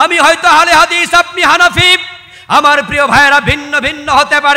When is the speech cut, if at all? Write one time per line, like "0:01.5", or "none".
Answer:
none